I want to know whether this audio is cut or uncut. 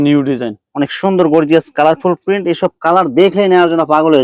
uncut